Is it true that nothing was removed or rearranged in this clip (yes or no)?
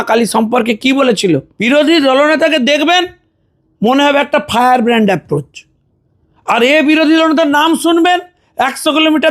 no